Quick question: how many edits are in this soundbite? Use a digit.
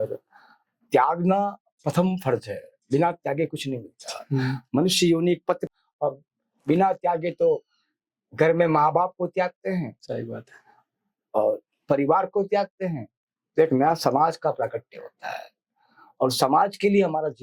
1